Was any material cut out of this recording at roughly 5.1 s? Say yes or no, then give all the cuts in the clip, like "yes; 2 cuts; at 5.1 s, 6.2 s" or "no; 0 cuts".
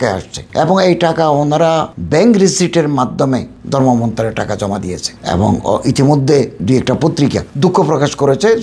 yes; 1 cut; at 5.1 s